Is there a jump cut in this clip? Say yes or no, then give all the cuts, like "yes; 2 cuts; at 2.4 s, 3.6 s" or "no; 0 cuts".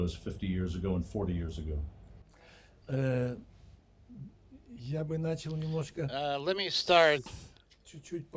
no; 0 cuts